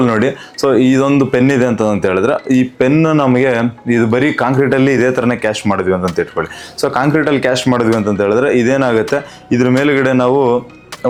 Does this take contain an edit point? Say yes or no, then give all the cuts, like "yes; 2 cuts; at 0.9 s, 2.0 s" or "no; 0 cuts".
no; 0 cuts